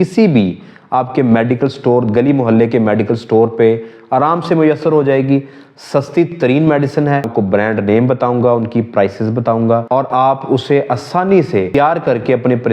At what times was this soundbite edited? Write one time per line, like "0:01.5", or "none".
0:07.3
0:09.8
0:11.7